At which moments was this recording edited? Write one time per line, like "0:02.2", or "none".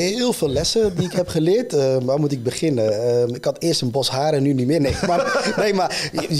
none